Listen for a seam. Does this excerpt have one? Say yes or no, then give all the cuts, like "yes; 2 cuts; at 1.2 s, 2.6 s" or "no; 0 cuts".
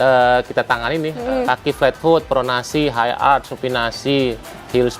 yes; 1 cut; at 1.2 s